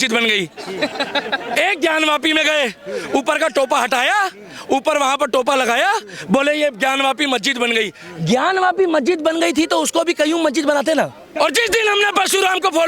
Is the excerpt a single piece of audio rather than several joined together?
no; 1 cut; at 11.2 s

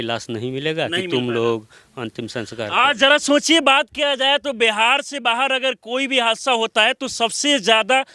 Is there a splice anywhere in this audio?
no; 0 cuts

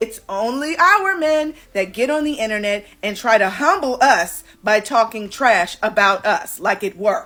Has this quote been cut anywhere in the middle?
no; 0 cuts

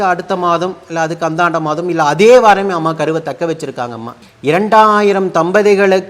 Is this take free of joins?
yes; 0 cuts

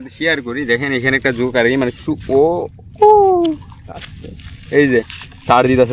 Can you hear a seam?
no; 0 cuts

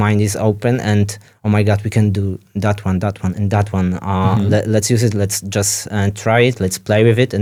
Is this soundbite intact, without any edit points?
yes; 0 cuts

